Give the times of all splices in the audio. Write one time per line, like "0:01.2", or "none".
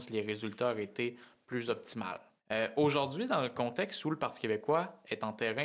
0:02.3